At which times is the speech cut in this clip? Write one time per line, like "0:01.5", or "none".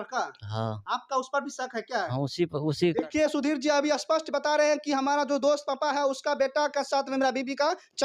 none